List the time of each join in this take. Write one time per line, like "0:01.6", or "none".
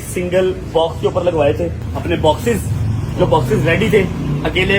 0:01.9